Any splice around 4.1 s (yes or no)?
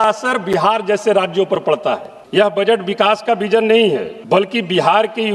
yes